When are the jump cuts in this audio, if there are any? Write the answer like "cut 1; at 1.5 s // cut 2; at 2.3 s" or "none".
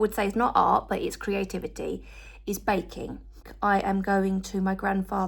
cut 1; at 3.4 s